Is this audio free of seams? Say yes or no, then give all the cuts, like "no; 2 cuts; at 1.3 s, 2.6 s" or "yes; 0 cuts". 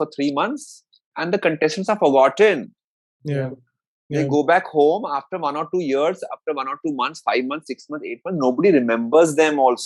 yes; 0 cuts